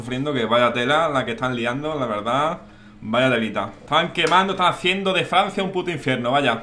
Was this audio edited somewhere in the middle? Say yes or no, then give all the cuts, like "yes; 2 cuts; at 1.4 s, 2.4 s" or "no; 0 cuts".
yes; 1 cut; at 3.8 s